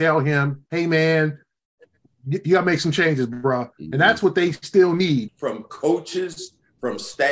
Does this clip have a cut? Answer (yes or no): yes